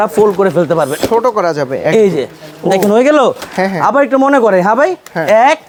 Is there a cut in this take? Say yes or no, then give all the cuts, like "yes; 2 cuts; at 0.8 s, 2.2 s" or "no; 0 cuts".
no; 0 cuts